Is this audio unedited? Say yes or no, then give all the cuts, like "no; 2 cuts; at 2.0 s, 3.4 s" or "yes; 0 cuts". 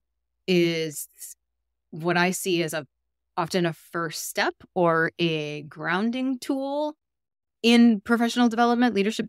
yes; 0 cuts